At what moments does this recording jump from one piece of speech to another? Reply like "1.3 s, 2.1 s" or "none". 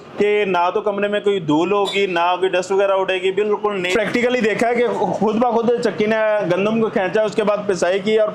3.9 s